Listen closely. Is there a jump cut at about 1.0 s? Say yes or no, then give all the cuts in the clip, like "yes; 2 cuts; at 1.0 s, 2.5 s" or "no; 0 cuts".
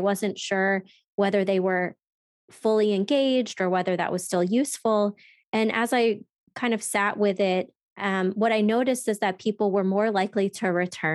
no; 0 cuts